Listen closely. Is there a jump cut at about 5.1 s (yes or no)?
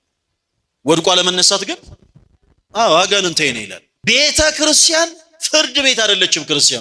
no